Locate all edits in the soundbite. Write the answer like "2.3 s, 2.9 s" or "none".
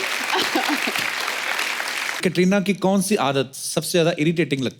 2.1 s